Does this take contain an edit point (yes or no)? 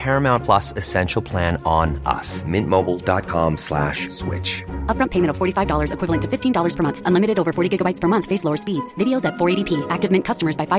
no